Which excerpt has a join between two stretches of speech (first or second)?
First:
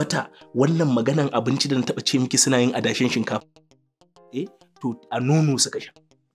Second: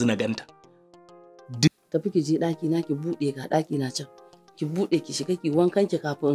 second